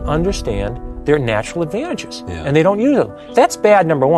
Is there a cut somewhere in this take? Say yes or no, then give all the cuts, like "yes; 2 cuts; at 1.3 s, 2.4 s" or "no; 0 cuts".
yes; 1 cut; at 3.2 s